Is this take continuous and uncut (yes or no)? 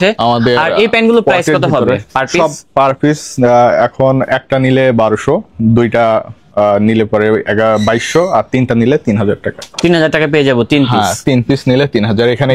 yes